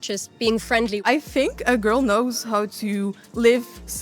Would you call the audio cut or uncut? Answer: cut